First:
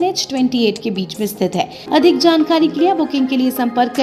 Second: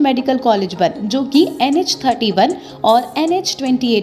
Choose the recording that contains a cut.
first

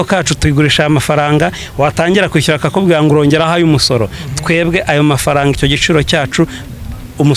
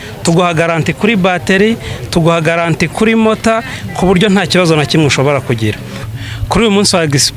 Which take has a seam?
second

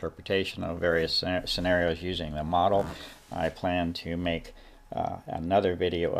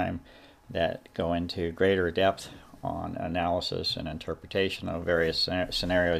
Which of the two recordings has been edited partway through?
second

